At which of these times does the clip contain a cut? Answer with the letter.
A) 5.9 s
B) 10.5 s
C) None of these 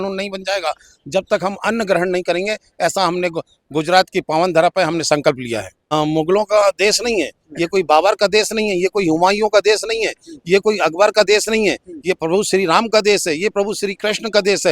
A